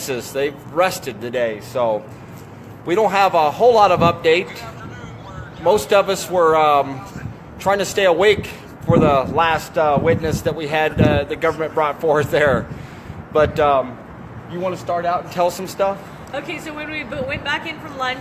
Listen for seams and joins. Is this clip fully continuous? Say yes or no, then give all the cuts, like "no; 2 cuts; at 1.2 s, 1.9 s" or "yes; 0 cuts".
yes; 0 cuts